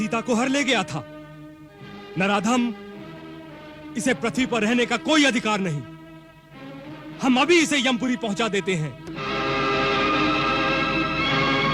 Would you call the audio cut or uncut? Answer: uncut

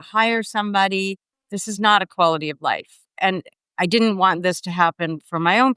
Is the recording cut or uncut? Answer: cut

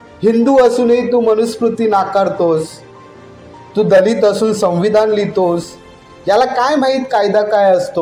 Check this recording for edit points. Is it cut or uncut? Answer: uncut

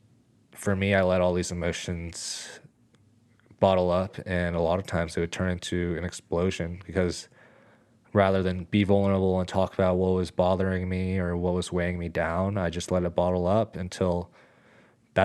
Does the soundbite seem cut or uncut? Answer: uncut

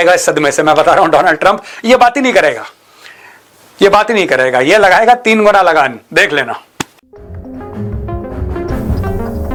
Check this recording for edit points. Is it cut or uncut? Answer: uncut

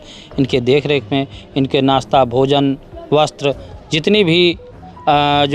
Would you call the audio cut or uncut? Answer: uncut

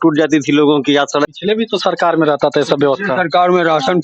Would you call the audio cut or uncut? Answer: cut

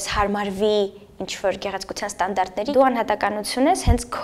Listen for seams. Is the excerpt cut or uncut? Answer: cut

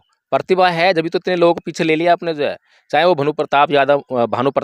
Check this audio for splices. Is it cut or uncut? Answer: uncut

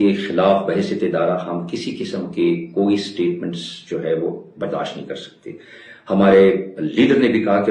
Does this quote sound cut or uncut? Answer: uncut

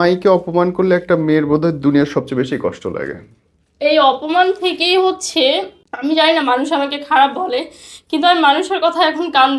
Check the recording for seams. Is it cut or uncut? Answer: cut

